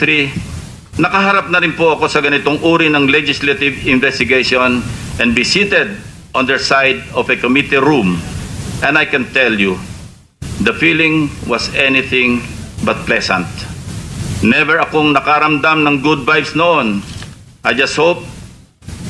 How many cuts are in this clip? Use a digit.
1